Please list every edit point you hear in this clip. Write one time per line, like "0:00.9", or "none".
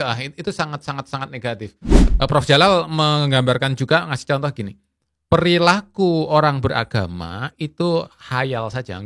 0:02.0